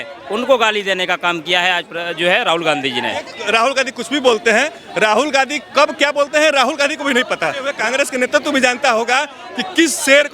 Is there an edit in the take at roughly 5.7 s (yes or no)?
no